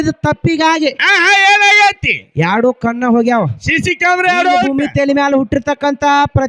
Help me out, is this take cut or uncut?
cut